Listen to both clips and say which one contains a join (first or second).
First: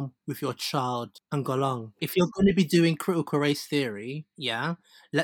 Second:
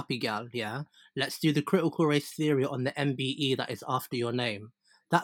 first